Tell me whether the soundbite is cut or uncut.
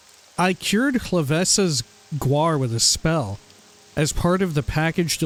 uncut